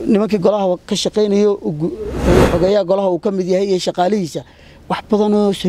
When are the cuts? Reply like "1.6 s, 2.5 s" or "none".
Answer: 2.2 s